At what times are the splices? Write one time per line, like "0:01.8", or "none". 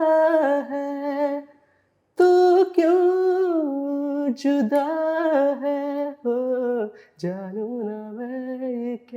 none

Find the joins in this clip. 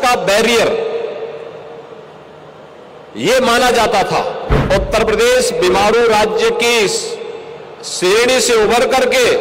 0:04.5

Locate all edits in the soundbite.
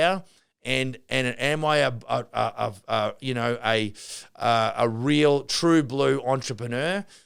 none

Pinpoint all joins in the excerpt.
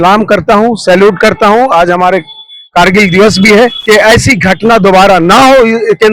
0:03.8

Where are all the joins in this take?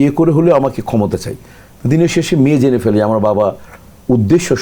none

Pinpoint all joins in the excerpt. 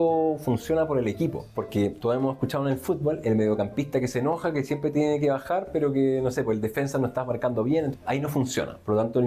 0:01.5
0:07.9

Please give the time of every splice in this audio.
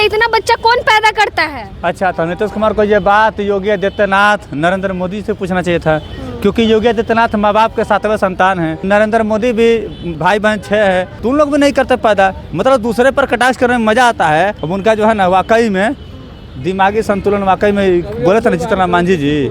0:08.8
0:10.1
0:11.1
0:14.6

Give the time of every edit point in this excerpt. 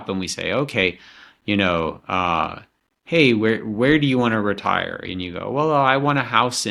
none

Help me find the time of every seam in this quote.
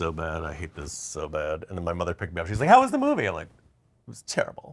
none

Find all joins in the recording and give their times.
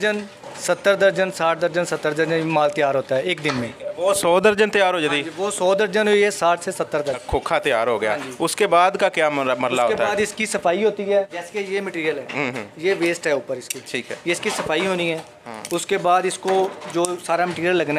0:07.2
0:11.3

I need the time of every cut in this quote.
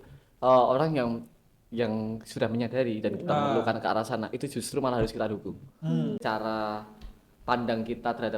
0:06.2

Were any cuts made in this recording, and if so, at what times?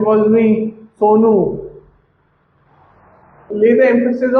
0:03.5

